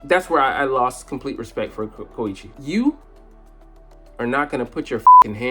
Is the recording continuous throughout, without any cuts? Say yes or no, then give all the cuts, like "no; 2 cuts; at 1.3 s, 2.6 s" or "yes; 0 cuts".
no; 1 cut; at 2.5 s